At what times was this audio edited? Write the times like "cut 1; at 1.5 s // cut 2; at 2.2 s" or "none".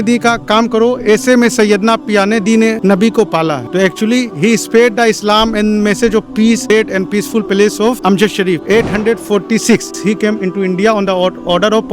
cut 1; at 6.7 s // cut 2; at 8.6 s // cut 3; at 10.0 s